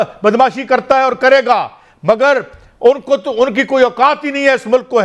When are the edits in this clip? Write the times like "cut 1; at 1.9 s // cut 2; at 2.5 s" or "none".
none